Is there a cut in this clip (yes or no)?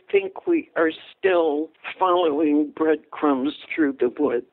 yes